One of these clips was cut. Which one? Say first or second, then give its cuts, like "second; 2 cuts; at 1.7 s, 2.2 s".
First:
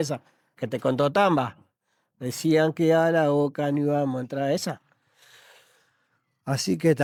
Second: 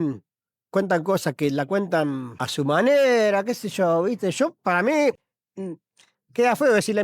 second; 1 cut; at 2.4 s